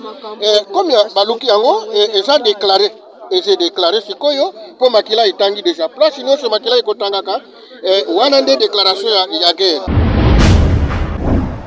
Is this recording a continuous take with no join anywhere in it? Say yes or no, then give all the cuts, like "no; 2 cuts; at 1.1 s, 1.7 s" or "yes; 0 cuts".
no; 1 cut; at 9.8 s